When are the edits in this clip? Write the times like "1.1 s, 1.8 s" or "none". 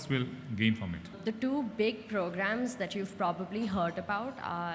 1.1 s